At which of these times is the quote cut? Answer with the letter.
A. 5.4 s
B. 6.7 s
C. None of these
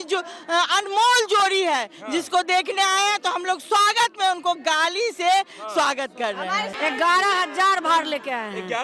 B